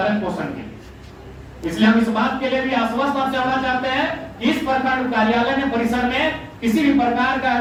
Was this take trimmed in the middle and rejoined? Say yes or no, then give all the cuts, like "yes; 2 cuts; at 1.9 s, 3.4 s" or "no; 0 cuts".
no; 0 cuts